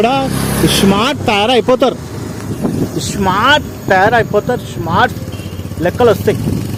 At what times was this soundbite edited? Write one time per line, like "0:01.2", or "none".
none